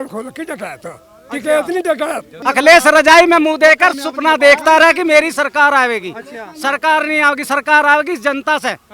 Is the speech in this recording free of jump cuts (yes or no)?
no